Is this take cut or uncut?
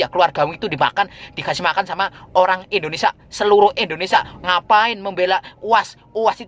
cut